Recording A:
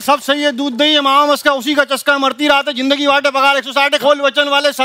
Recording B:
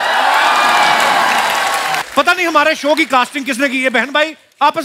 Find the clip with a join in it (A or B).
B